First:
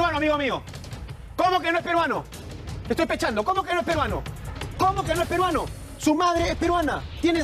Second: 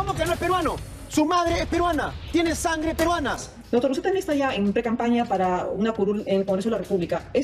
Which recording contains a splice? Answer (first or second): second